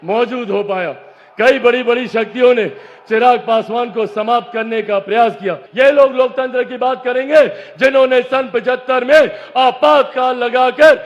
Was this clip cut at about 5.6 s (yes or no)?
yes